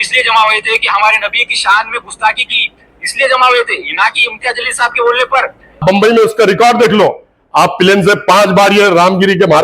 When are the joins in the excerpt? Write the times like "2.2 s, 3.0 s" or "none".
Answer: 5.8 s